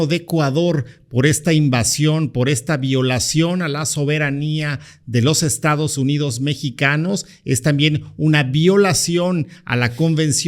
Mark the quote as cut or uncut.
uncut